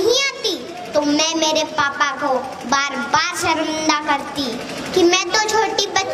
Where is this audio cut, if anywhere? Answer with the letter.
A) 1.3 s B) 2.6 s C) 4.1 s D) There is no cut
D